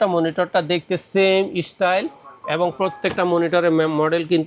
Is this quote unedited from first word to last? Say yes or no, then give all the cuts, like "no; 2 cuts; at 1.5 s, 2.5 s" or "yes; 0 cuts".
yes; 0 cuts